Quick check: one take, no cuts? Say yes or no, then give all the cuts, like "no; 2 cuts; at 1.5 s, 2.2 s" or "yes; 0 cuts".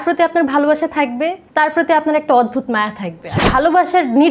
no; 2 cuts; at 1.4 s, 3.4 s